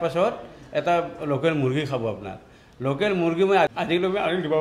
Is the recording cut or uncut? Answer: cut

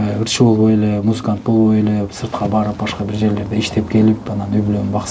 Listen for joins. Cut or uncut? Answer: uncut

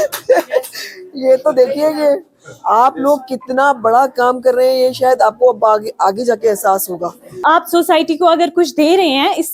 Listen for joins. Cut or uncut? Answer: cut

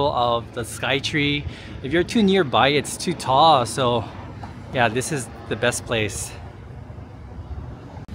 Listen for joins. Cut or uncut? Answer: uncut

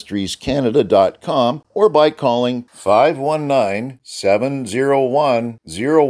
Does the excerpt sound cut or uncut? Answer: cut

